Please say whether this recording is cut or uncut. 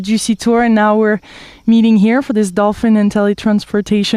uncut